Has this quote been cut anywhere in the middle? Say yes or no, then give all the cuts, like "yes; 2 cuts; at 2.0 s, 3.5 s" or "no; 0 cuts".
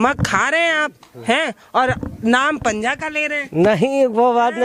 no; 0 cuts